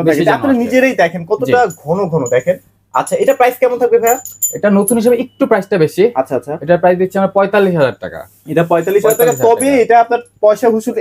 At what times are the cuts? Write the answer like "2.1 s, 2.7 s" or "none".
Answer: none